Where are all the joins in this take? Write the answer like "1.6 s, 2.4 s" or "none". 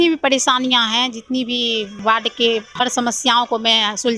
1.9 s, 2.7 s